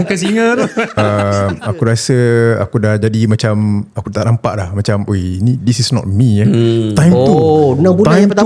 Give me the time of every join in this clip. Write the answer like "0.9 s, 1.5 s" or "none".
1.0 s